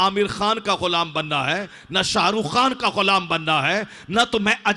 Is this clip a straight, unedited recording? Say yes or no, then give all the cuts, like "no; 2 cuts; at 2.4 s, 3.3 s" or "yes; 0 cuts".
yes; 0 cuts